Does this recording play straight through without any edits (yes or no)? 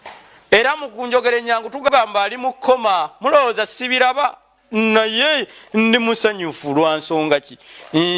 yes